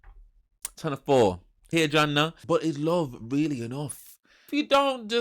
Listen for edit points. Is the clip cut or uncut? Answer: cut